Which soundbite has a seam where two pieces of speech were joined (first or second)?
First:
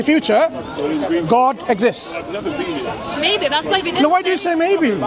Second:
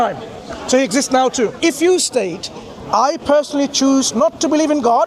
second